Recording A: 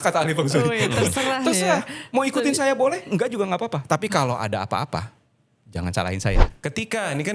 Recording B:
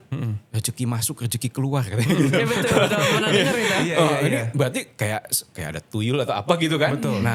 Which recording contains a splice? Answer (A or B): A